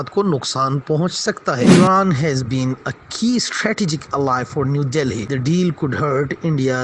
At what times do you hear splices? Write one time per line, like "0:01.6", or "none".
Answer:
0:01.7